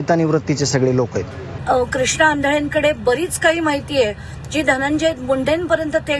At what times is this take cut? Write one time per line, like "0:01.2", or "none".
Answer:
0:01.6